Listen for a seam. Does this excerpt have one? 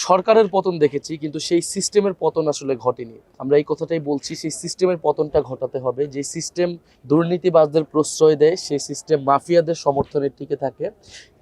no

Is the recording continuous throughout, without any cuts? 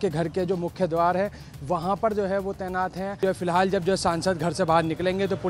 no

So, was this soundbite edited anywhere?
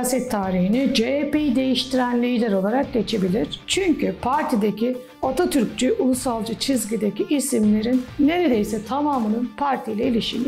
no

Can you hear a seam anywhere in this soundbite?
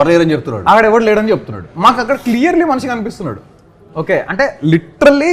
no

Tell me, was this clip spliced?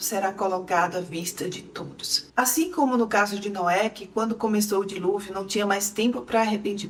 no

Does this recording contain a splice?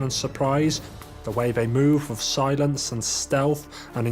yes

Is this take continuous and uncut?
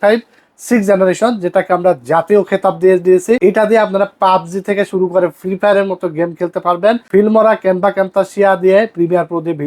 no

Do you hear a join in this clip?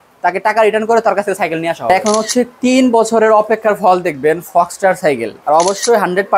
yes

